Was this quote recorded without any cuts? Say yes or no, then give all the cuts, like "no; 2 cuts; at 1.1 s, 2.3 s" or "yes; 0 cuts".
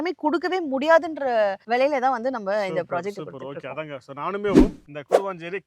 yes; 0 cuts